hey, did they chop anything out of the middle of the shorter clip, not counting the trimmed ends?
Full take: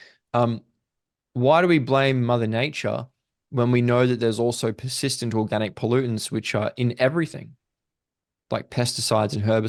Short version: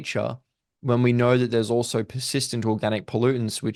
no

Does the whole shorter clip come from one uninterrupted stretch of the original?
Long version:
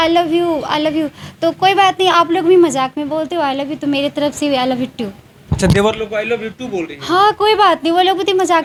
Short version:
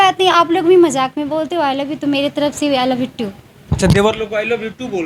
yes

